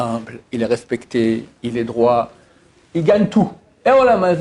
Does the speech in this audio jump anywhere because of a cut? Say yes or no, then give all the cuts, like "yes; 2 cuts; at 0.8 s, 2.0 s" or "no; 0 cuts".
no; 0 cuts